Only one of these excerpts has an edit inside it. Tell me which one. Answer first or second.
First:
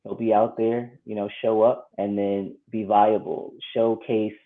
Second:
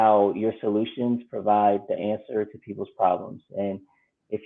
first